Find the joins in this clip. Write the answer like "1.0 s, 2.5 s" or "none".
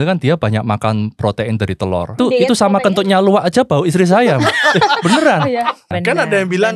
2.2 s, 5.9 s